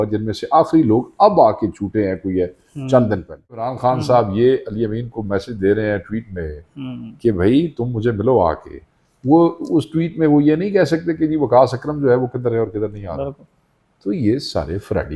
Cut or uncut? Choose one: cut